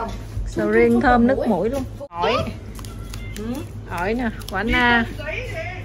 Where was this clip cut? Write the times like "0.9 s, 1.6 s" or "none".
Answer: 2.0 s

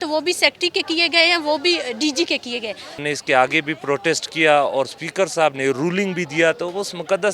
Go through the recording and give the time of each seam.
3.0 s

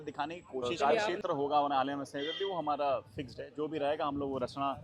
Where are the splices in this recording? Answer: 1.1 s

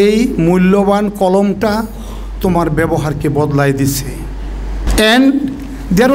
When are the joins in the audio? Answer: 4.8 s

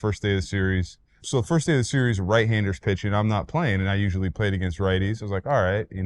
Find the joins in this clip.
1.1 s

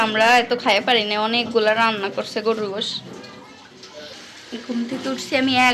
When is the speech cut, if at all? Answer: none

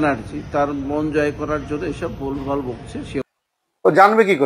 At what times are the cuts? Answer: 3.2 s

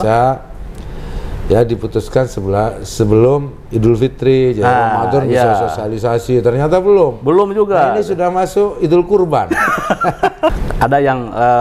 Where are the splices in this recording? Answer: 10.6 s

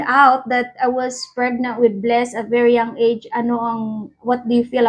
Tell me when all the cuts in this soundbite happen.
none

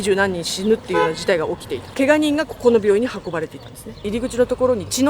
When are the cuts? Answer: 1.9 s, 4.0 s

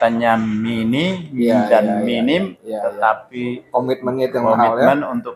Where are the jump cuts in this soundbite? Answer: none

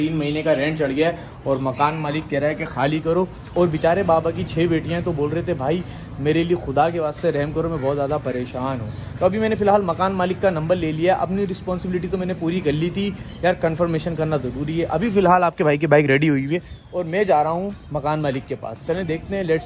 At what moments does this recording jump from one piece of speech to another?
none

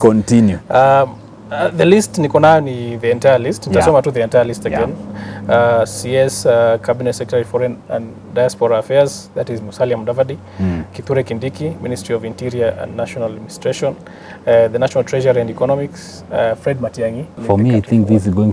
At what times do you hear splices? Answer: 17.3 s

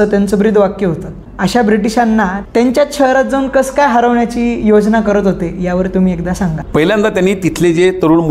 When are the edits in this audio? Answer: none

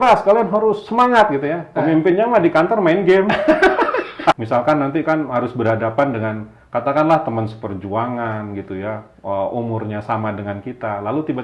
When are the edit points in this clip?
4.4 s

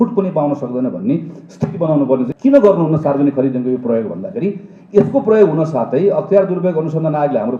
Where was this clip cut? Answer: 2.3 s

